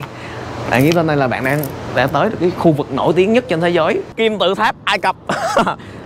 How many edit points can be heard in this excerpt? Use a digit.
1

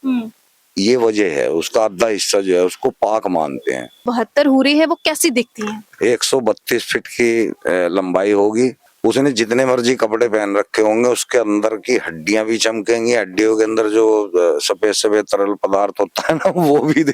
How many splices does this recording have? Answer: 2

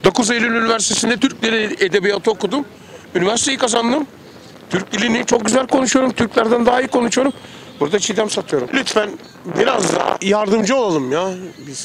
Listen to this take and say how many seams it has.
3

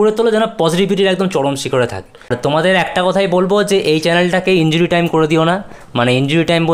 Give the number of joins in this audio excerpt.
1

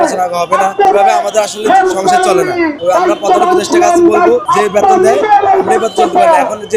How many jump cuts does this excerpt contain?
3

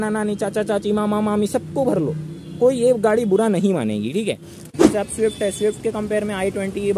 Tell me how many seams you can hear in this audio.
1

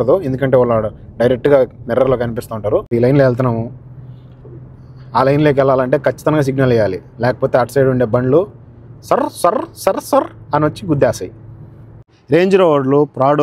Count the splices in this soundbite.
2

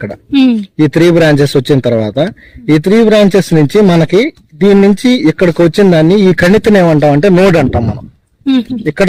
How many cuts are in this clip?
0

